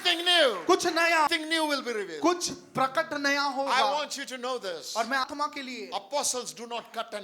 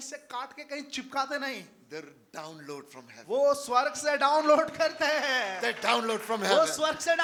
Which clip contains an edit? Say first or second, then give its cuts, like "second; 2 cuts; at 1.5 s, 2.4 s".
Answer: first; 2 cuts; at 1.3 s, 5.2 s